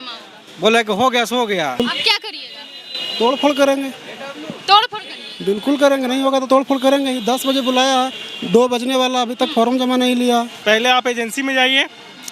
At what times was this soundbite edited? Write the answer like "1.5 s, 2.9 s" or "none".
1.8 s, 10.5 s